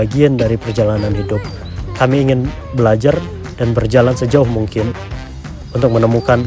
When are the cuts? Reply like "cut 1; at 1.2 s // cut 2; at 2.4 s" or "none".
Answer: cut 1; at 1.9 s